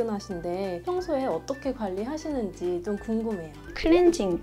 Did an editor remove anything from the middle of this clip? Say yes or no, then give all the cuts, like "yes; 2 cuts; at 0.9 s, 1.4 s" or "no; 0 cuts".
no; 0 cuts